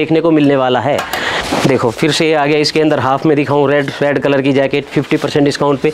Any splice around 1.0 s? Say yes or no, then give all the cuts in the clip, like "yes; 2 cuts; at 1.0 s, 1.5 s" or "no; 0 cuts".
no; 0 cuts